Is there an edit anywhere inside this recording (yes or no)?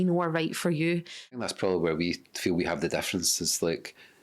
yes